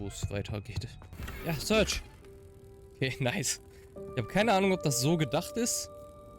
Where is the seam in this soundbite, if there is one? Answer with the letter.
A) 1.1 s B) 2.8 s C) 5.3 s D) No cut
A